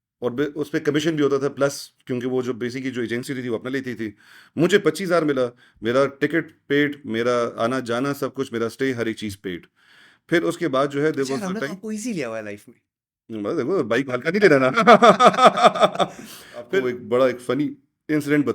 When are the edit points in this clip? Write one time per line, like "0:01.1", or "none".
0:16.7